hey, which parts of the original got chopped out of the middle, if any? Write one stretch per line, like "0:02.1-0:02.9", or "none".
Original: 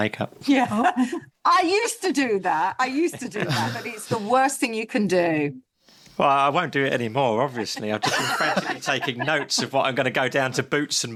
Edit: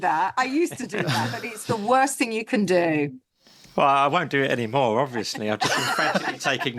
none